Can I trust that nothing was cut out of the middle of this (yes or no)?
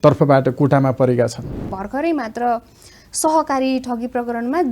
no